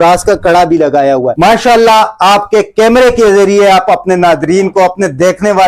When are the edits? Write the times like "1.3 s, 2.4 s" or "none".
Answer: 1.3 s